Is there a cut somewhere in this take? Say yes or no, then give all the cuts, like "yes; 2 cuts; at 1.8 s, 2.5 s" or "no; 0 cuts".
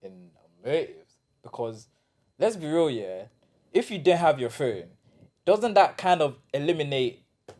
no; 0 cuts